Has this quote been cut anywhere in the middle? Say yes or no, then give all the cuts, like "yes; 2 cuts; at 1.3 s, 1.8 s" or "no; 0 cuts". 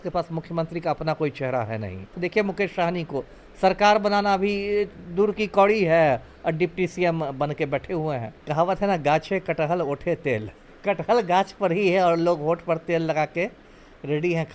yes; 3 cuts; at 2.1 s, 8.4 s, 10.7 s